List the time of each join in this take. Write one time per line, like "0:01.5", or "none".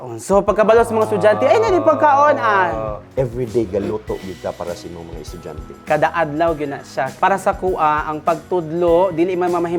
0:03.0
0:05.8
0:07.1